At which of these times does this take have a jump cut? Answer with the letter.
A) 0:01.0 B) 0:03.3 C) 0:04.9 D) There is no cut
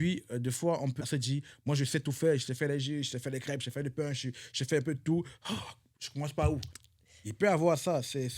A